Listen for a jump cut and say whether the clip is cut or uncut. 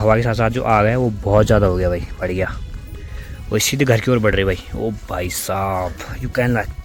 uncut